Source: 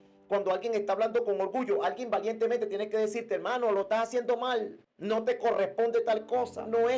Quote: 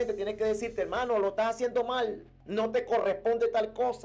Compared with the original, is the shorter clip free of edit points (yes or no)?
yes